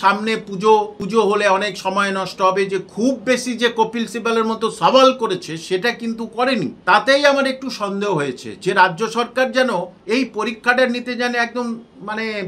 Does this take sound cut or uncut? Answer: cut